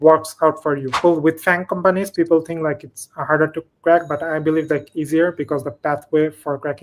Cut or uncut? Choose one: cut